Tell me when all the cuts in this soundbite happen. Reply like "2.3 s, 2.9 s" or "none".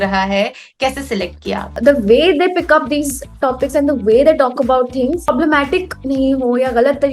1.7 s, 5.3 s